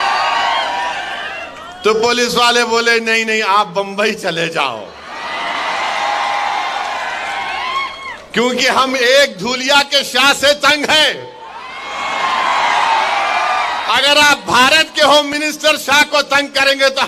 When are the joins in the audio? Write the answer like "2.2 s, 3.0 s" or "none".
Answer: none